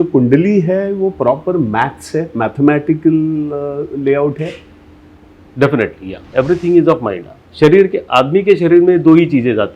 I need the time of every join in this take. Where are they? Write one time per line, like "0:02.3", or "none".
0:06.2